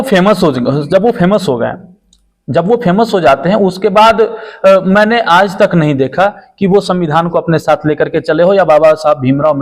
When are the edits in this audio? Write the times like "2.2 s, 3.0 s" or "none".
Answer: none